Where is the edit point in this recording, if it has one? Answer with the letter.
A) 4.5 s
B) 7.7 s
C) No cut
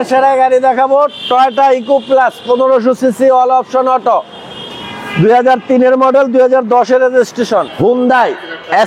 B